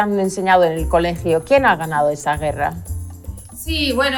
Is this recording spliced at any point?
no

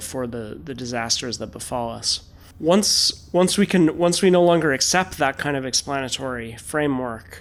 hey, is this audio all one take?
yes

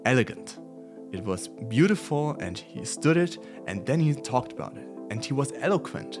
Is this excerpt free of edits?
yes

